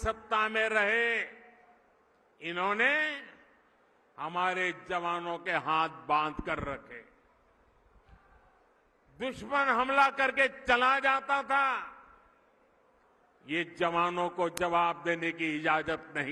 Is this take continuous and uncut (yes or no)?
yes